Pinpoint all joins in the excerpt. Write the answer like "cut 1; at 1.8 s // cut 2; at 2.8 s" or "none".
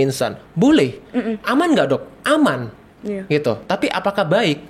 cut 1; at 2.9 s